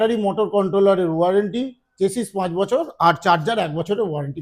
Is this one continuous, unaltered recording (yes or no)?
yes